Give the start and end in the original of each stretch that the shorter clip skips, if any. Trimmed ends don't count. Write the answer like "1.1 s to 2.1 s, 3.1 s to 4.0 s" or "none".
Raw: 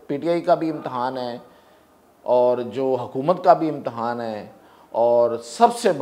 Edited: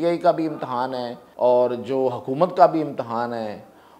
1.4 s to 2.1 s

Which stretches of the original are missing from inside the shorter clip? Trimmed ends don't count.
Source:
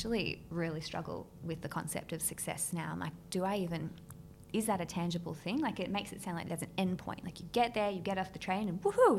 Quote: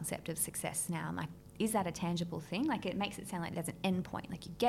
3.2 s to 4.3 s

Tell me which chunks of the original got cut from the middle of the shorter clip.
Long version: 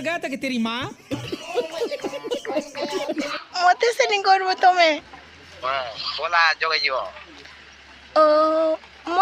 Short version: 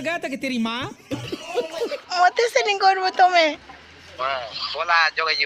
2.0 s to 3.4 s

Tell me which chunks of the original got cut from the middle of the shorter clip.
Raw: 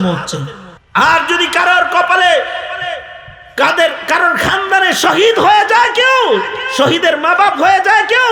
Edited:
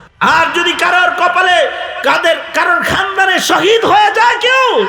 2.6 s to 3.4 s

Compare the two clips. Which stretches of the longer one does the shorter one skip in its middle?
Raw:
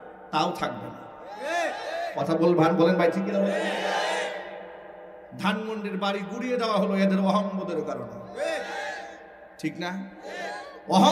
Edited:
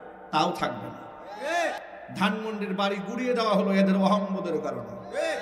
1.8 s to 5.0 s

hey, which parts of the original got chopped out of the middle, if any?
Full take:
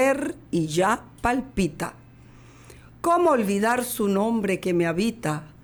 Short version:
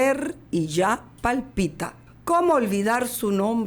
2.1 s to 2.8 s

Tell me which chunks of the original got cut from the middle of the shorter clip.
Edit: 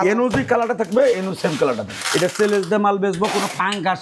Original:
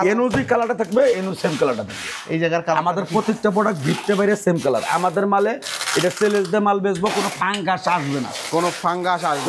1.9 s to 5.8 s

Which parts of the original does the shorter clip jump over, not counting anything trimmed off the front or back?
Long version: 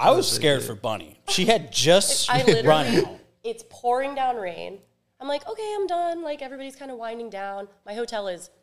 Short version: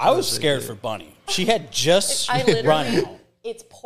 none

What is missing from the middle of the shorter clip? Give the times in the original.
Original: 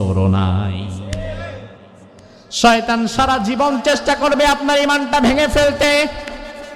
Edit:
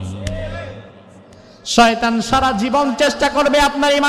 none

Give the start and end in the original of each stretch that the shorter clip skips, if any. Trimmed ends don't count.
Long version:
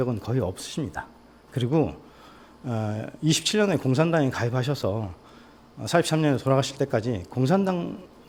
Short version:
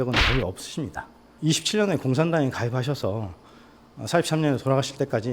1.3 s to 3.1 s

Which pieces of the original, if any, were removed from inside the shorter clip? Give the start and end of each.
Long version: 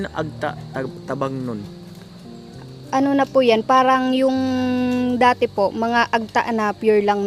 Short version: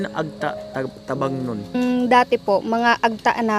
1.8 s to 4.8 s

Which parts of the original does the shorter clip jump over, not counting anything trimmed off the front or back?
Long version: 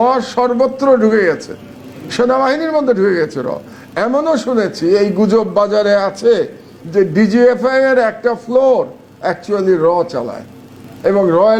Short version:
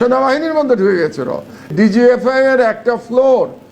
3.9 s to 7.1 s

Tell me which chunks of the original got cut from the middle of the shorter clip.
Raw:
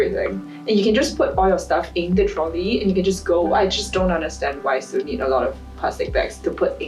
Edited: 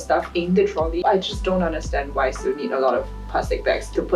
2.6 s to 3.5 s

